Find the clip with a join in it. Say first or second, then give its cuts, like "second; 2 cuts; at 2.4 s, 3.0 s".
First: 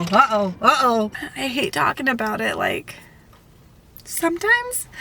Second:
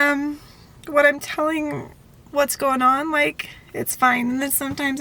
first; 1 cut; at 1.2 s